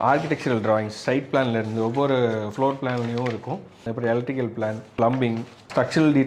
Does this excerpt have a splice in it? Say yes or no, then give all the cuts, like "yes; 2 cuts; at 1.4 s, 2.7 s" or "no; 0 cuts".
no; 0 cuts